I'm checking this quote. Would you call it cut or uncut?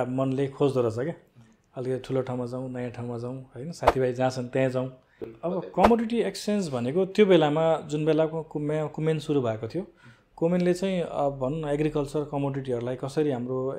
cut